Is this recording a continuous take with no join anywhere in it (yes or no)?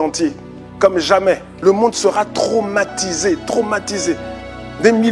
no